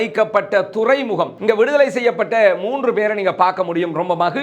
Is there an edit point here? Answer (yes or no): yes